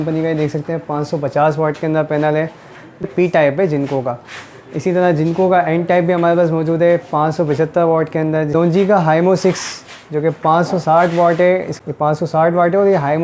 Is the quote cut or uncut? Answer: cut